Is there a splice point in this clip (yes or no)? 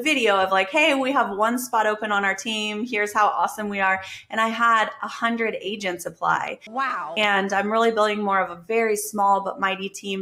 no